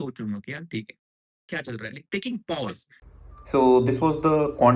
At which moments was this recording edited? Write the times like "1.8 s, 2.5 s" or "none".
3.1 s